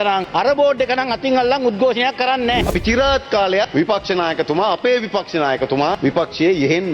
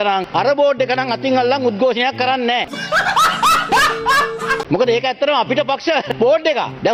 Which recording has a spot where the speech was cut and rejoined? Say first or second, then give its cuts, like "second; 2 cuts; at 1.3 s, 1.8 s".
first; 1 cut; at 2.7 s